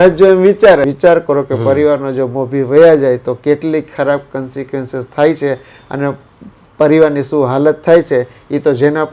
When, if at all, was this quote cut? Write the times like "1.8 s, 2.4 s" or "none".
0.9 s